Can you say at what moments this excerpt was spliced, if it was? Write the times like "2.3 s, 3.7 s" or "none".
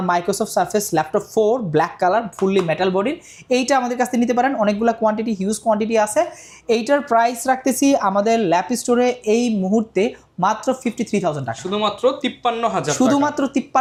none